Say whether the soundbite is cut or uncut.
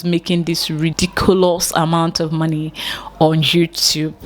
cut